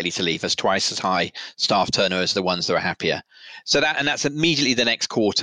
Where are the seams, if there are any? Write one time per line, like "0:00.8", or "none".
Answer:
none